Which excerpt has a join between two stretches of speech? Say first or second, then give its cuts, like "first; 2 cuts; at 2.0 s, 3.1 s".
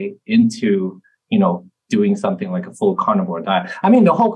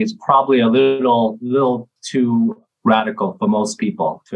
second; 1 cut; at 2.6 s